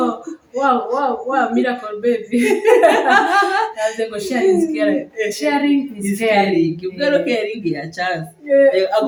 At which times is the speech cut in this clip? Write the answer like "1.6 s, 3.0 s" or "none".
none